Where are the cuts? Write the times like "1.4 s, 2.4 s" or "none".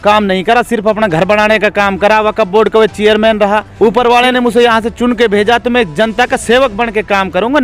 3.7 s

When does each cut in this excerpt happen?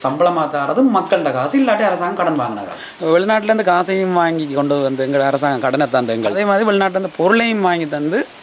2.7 s, 6.4 s

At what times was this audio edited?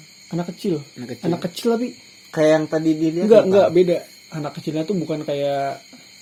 none

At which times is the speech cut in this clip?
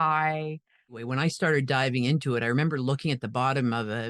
1.0 s

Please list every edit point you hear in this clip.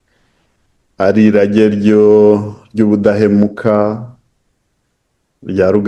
none

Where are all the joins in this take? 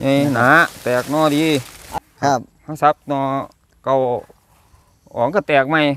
1.9 s

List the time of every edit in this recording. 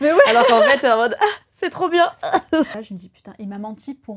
2.7 s

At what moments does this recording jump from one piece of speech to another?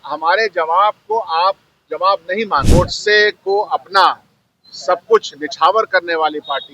2.7 s

